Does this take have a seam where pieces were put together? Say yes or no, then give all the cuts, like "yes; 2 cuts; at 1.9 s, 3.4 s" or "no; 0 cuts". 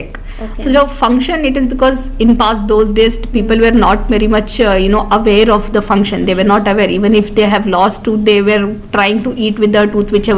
no; 0 cuts